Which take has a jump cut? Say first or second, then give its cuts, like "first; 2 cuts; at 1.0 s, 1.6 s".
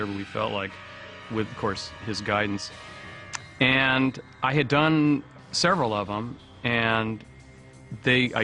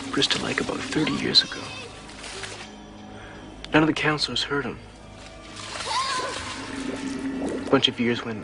first; 1 cut; at 7.2 s